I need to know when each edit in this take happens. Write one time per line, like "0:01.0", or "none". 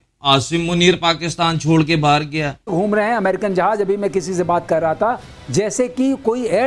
0:02.7